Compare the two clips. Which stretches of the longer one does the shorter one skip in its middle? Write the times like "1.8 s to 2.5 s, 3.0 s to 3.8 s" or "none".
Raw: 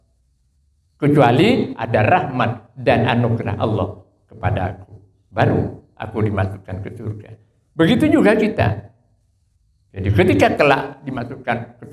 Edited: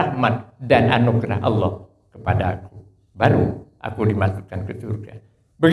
none